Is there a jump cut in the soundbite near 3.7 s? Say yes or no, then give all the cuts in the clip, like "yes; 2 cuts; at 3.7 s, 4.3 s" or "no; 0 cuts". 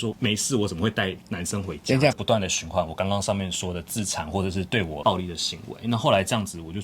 no; 2 cuts; at 2.1 s, 5.0 s